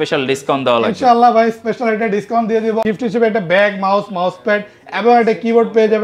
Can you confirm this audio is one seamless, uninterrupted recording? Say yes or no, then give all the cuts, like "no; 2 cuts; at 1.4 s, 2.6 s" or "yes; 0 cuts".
no; 1 cut; at 2.8 s